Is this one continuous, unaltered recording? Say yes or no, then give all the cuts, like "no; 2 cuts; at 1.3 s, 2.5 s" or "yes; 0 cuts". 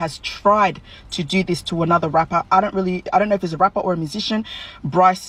yes; 0 cuts